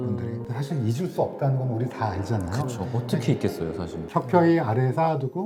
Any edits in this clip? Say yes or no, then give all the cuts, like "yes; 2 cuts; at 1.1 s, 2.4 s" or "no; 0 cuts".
no; 0 cuts